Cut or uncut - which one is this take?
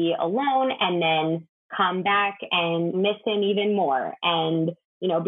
uncut